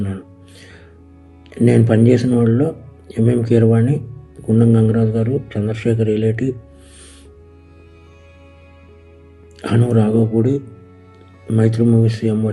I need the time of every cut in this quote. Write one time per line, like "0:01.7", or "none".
0:06.7
0:08.5